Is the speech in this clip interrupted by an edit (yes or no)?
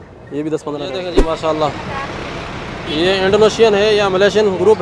yes